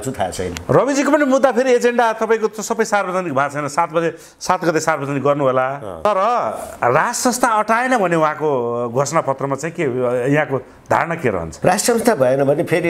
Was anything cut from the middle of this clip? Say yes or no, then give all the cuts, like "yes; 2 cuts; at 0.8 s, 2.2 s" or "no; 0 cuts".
no; 0 cuts